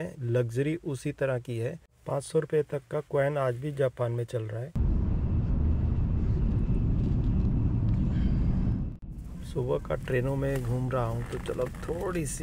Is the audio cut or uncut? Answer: cut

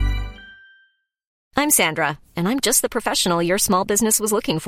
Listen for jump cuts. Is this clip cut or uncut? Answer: cut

